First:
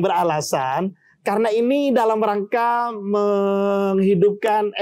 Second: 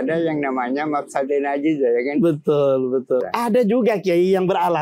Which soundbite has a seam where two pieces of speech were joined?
second; 1 cut; at 3.2 s

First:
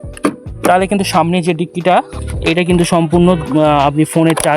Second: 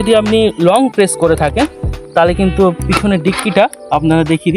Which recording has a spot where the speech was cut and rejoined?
first; 1 cut; at 2.1 s

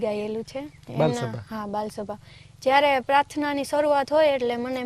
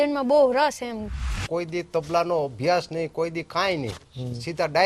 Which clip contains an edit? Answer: second; 1 cut; at 1.4 s

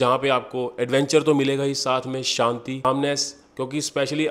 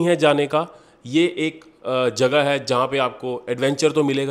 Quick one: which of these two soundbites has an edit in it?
first; 1 cut; at 2.9 s

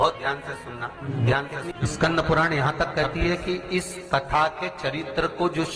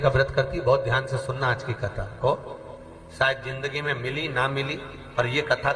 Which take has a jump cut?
first; 2 cuts; at 1.0 s, 1.7 s

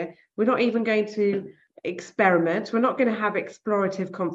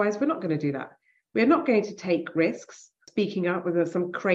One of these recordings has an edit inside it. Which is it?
second; 1 cut; at 3.0 s

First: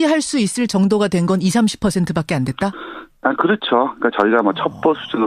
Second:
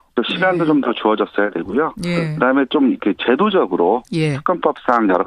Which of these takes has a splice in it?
second; 1 cut; at 2.6 s

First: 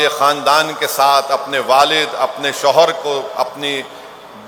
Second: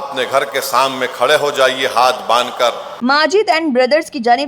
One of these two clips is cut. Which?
second; 1 cut; at 3.0 s

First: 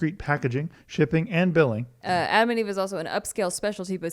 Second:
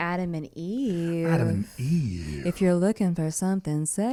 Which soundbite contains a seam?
first; 1 cut; at 1.9 s

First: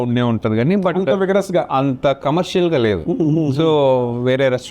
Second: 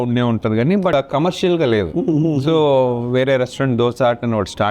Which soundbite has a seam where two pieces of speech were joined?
second; 1 cut; at 0.9 s

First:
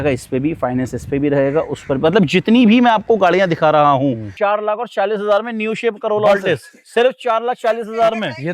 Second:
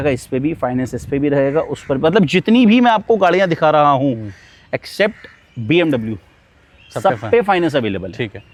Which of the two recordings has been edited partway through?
first; 1 cut; at 4.3 s

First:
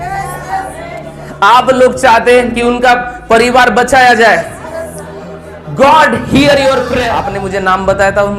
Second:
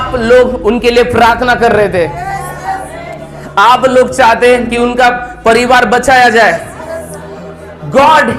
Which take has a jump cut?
first; 1 cut; at 7.2 s

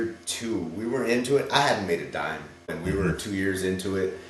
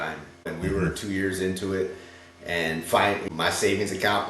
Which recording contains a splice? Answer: second; 1 cut; at 3.2 s

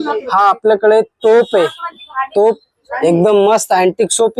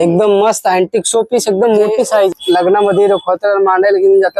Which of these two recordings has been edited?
second; 1 cut; at 2.3 s

